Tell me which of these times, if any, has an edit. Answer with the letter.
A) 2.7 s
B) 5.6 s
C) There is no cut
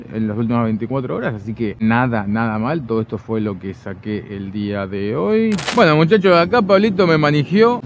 B